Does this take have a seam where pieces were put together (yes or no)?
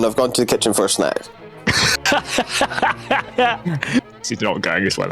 yes